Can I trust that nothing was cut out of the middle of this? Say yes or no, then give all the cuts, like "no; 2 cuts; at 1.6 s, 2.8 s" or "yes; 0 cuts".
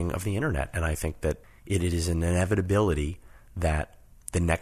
no; 1 cut; at 1.5 s